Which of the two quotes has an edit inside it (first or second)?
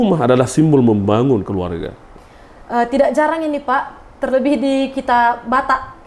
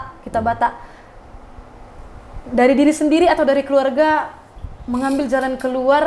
first